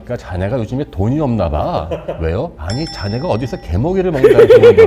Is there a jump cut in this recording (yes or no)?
no